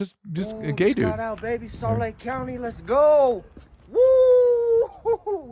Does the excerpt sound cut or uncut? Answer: uncut